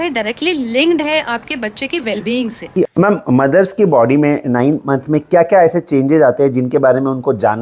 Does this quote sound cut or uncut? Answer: cut